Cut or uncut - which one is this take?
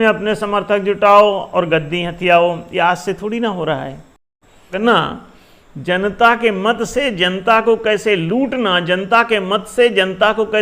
cut